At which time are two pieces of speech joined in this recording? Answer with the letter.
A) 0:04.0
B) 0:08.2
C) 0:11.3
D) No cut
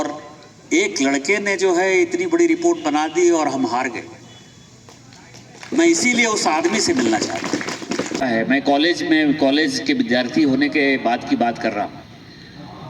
B